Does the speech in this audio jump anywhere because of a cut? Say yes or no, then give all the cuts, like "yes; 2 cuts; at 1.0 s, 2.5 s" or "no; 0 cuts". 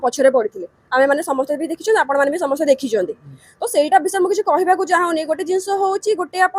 no; 0 cuts